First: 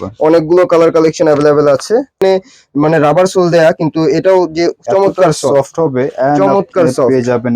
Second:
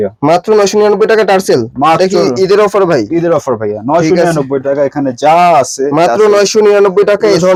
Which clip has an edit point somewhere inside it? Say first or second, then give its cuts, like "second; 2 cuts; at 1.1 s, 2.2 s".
first; 1 cut; at 2.2 s